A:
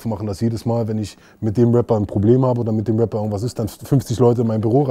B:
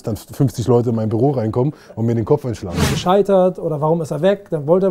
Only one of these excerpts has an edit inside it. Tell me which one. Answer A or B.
B